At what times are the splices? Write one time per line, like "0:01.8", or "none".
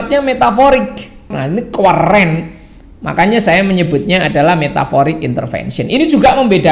0:01.4